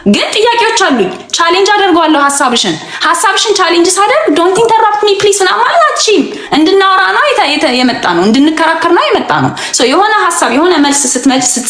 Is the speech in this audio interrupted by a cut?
no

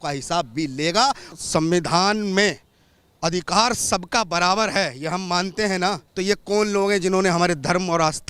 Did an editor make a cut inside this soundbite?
yes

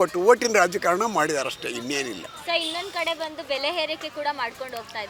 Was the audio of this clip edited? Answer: no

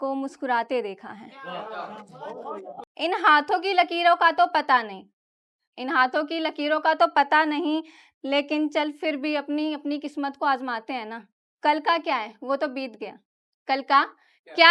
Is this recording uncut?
no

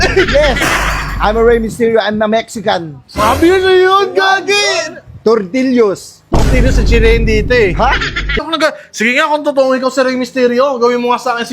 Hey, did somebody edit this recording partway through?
yes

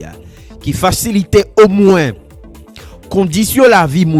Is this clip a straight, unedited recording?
yes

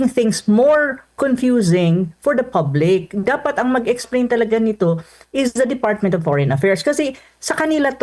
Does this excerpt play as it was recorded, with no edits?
yes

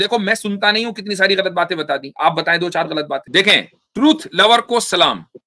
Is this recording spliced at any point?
yes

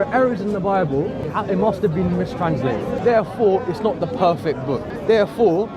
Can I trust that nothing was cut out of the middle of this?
no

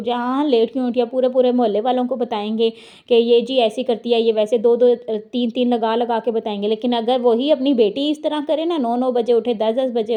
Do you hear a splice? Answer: no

